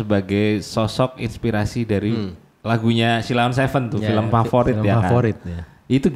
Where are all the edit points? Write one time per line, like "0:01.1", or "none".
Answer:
none